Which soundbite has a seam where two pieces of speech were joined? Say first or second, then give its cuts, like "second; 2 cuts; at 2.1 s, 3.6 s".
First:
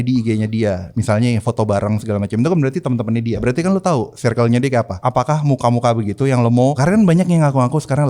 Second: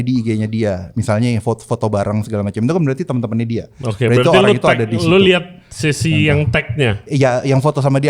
first; 4 cuts; at 1.4 s, 3.4 s, 5.0 s, 6.8 s